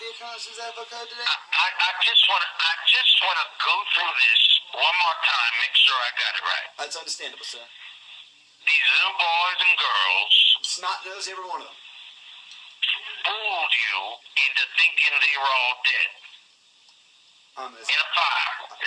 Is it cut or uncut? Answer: uncut